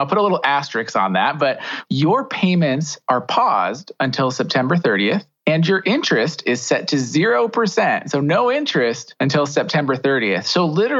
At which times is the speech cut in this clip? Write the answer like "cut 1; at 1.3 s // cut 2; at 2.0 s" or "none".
cut 1; at 1.7 s // cut 2; at 9.1 s